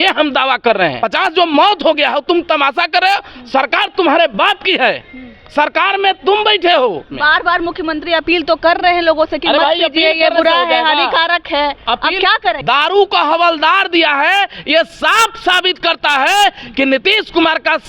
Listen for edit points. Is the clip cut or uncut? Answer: cut